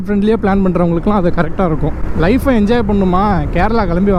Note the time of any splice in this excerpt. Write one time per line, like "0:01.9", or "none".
none